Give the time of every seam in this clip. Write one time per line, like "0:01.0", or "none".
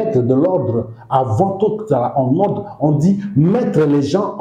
none